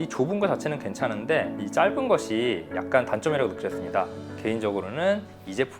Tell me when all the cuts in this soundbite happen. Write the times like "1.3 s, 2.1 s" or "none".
4.2 s